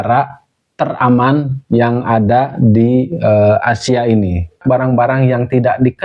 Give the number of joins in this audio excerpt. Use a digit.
1